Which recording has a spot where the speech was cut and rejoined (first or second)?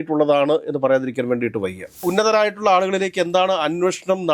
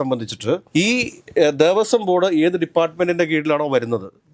first